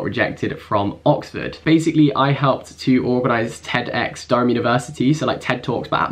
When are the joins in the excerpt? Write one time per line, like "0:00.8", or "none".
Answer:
none